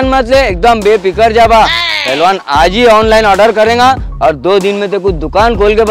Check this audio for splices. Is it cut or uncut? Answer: uncut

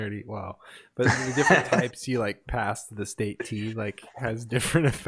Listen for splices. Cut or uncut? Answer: uncut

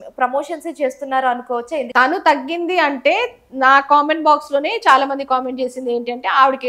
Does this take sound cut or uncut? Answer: cut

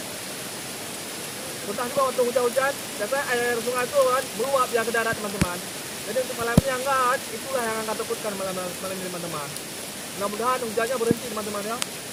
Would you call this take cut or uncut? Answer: uncut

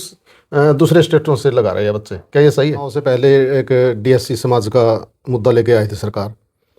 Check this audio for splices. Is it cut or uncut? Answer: cut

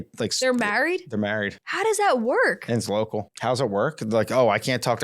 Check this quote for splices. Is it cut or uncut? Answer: cut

